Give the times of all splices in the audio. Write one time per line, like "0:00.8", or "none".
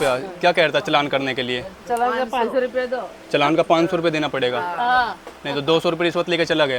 none

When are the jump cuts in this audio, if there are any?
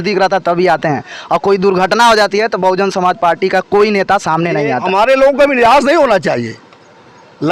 0:04.8

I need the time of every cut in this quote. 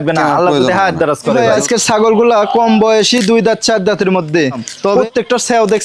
0:01.4
0:04.9

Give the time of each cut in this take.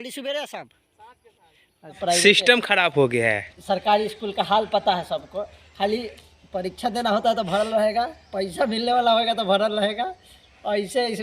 0:02.0

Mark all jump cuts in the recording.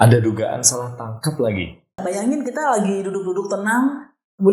0:02.0

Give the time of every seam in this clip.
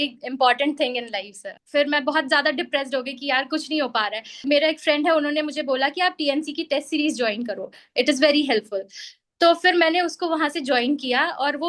0:01.5
0:04.4

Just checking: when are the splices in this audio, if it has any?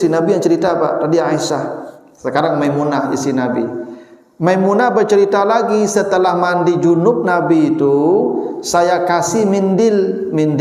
none

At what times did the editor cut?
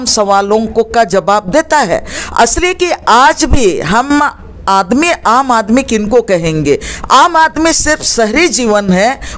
none

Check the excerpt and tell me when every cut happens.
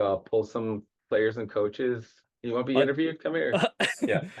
0:00.9
0:02.3

